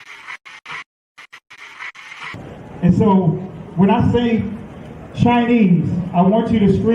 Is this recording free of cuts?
no; 1 cut; at 1.0 s

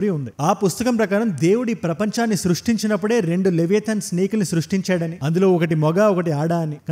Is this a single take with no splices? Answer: yes; 0 cuts

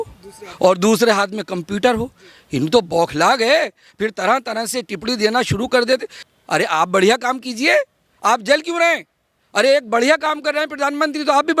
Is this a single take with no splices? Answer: no; 1 cut; at 6.2 s

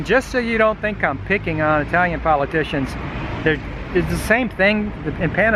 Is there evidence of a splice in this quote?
no; 0 cuts

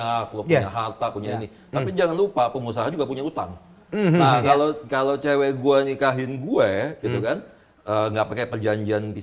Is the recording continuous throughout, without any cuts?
yes; 0 cuts

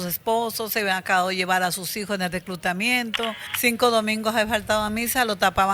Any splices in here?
yes; 1 cut; at 3.4 s

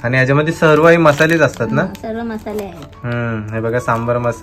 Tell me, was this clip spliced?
no; 0 cuts

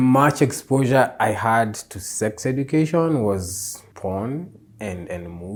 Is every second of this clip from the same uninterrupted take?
yes; 0 cuts

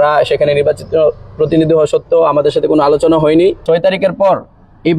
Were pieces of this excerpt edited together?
yes; 1 cut; at 3.6 s

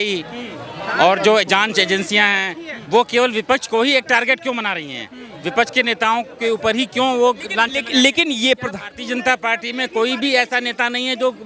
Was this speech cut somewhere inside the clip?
no; 0 cuts

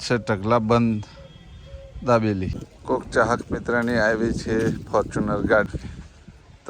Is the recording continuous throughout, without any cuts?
no; 2 cuts; at 2.7 s, 5.7 s

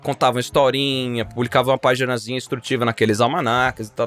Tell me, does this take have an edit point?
no; 0 cuts

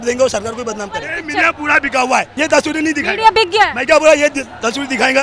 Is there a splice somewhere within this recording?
yes; 2 cuts; at 1.2 s, 2.3 s

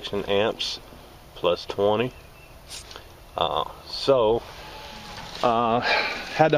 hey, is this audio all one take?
no; 1 cut; at 2.2 s

